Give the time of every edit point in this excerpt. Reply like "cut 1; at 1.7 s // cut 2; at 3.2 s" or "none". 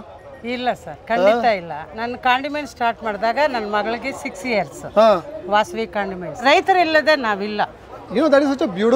cut 1; at 6.4 s